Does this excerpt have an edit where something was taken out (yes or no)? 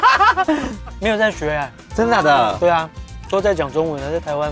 yes